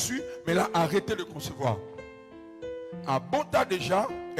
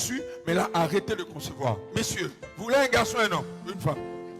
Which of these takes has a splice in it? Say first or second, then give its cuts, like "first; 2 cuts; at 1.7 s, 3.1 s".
second; 1 cut; at 1.8 s